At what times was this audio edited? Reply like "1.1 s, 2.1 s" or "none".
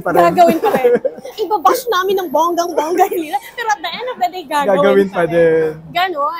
none